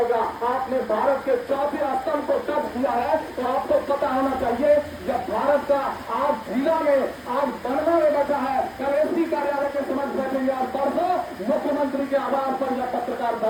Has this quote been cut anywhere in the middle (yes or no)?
no